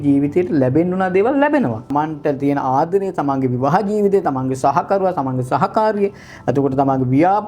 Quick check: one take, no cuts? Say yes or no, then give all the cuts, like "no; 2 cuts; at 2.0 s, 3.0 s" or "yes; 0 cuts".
no; 1 cut; at 1.9 s